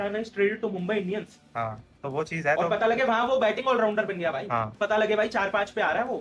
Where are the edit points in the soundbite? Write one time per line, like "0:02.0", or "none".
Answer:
none